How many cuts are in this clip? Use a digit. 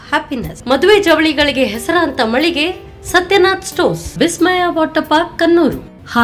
0